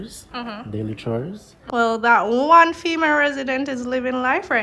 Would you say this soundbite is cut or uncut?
cut